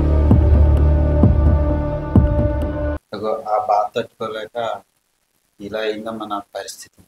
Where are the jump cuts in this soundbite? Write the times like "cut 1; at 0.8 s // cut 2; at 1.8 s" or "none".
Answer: none